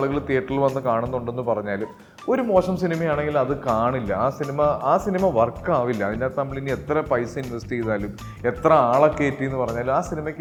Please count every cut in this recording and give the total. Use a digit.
0